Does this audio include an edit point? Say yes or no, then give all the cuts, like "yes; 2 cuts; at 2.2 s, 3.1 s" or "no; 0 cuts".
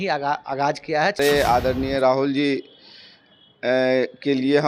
yes; 1 cut; at 1.2 s